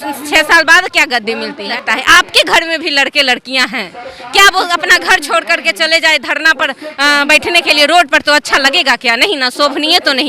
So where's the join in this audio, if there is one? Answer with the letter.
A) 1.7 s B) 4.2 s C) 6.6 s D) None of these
A